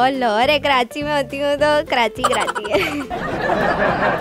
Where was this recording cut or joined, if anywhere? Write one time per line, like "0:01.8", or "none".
0:03.2